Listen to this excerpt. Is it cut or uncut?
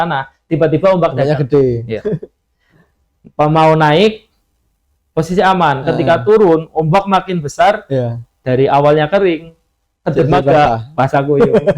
uncut